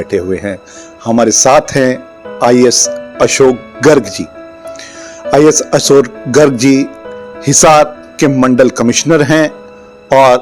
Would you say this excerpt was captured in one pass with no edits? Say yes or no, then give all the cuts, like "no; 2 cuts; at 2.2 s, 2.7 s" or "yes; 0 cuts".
yes; 0 cuts